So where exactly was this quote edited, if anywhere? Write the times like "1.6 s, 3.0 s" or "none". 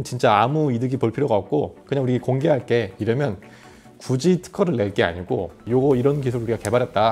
5.6 s